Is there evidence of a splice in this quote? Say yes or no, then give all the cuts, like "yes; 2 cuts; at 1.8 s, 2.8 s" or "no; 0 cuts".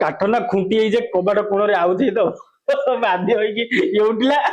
no; 0 cuts